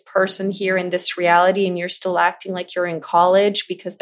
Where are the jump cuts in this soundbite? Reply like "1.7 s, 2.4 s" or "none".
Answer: none